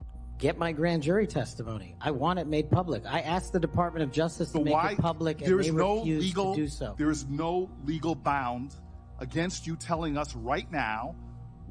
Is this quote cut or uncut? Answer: uncut